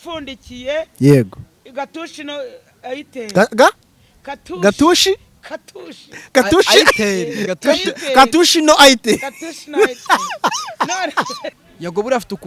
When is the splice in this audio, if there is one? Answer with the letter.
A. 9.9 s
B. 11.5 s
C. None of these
B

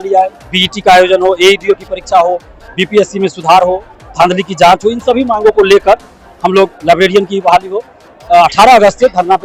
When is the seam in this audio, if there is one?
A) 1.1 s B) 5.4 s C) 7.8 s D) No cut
D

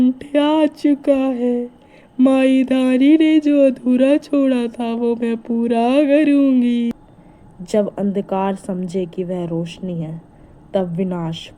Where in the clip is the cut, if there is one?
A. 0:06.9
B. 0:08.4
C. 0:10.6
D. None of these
A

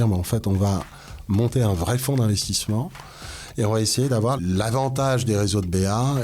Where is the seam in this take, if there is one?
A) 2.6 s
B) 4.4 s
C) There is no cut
B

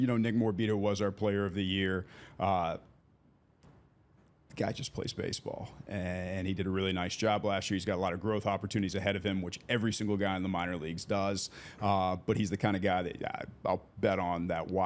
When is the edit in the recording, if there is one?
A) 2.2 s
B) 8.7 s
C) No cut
C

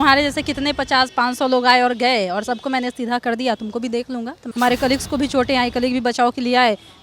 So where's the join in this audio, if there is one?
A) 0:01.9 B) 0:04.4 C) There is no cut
B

